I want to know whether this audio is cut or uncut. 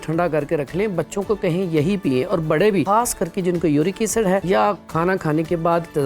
cut